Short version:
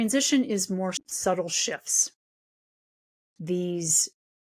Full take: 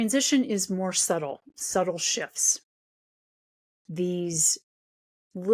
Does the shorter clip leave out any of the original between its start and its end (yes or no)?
yes